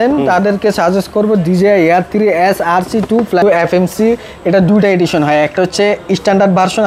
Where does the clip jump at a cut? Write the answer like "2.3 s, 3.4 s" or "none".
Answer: 3.4 s